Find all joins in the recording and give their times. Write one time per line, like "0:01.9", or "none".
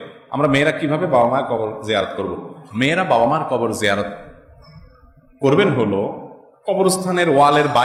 none